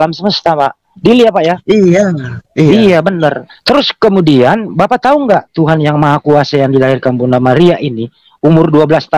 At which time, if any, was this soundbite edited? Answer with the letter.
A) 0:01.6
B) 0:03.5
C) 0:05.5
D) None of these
B